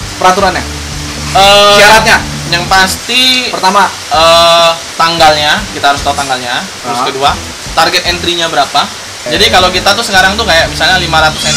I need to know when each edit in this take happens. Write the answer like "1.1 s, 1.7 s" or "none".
4.9 s, 9.2 s